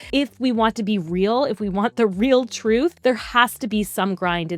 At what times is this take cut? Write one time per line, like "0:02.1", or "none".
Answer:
0:03.0